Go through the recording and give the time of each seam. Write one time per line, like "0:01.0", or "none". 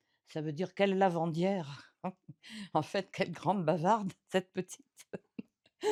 none